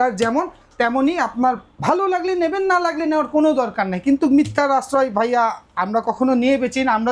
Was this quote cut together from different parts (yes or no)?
no